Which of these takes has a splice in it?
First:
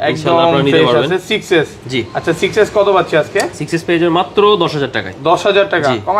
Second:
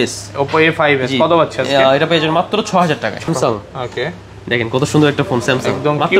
second; 1 cut; at 3.3 s

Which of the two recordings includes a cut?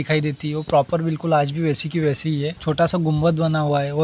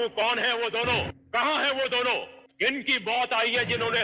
first; 1 cut; at 2.6 s

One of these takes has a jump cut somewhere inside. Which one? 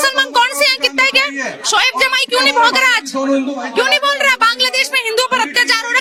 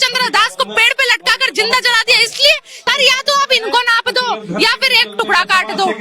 second; 1 cut; at 2.9 s

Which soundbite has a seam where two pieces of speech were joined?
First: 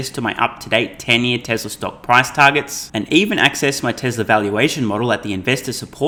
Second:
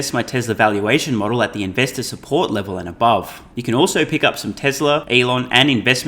second; 2 cuts; at 3.5 s, 5.0 s

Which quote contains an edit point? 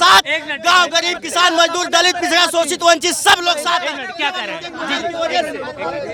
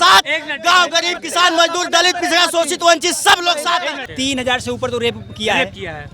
second; 1 cut; at 4.0 s

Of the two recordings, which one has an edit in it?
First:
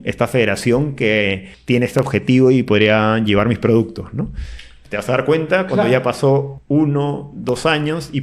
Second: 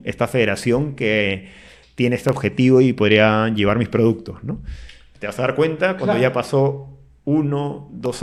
first; 2 cuts; at 1.5 s, 6.5 s

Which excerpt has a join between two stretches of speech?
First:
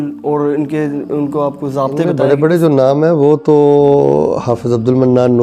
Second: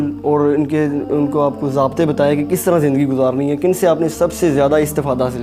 first; 1 cut; at 2.1 s

